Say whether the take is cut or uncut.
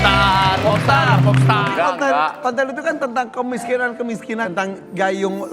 cut